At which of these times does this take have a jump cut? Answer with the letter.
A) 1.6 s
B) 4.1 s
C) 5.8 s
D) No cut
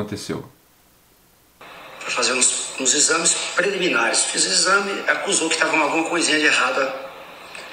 A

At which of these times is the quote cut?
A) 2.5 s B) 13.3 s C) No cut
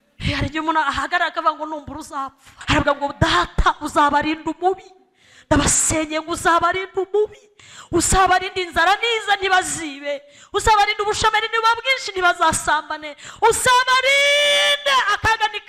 A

